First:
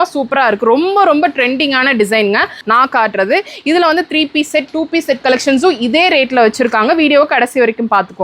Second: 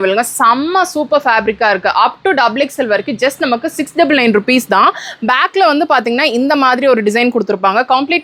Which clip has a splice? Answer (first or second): first